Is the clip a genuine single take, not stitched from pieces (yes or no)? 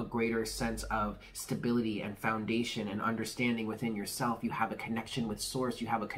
yes